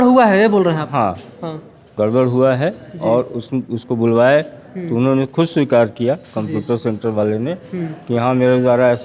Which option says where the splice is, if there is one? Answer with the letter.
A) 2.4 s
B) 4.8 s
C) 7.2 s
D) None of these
D